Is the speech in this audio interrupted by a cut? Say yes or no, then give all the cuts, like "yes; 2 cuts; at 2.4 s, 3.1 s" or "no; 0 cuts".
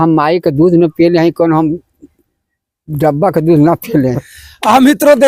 no; 0 cuts